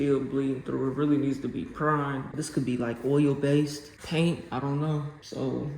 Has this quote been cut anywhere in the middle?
yes; 1 cut; at 2.3 s

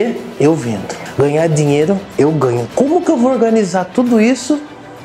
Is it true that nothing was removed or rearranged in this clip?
no; 2 cuts; at 1.0 s, 2.6 s

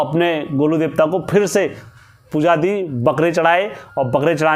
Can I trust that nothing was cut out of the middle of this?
yes; 0 cuts

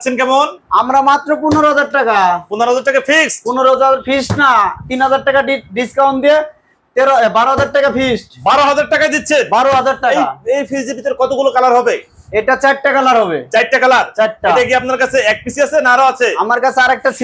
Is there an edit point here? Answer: no; 0 cuts

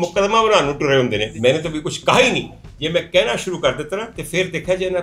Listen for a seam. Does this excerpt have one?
yes; 1 cut; at 1.3 s

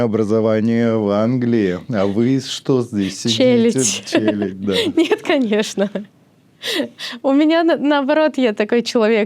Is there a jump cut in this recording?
no; 0 cuts

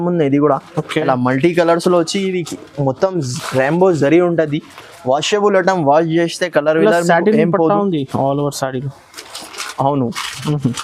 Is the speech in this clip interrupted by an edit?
no; 0 cuts

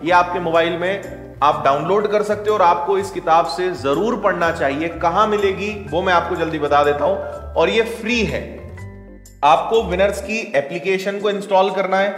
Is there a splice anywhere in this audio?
no; 0 cuts

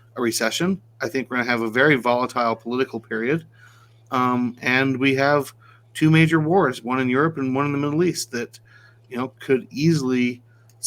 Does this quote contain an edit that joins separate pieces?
no; 0 cuts

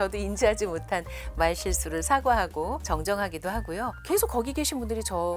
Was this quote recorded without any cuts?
no; 1 cut; at 4.0 s

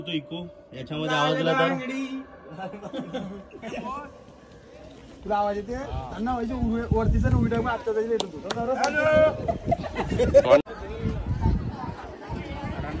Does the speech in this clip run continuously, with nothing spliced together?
yes; 0 cuts

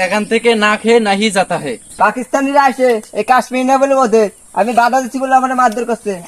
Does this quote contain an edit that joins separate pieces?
yes; 1 cut; at 1.8 s

